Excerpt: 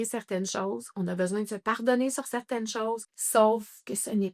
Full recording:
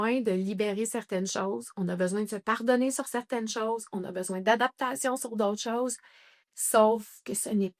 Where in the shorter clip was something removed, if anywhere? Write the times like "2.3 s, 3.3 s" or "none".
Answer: 3.1 s